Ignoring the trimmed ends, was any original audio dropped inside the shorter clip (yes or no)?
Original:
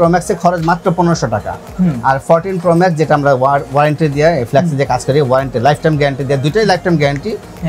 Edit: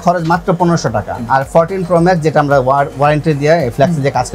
yes